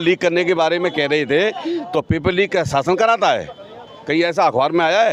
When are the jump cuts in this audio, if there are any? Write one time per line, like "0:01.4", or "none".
none